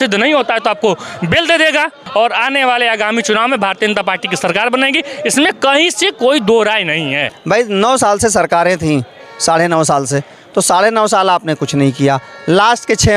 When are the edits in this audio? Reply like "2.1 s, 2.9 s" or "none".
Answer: 2.0 s, 7.3 s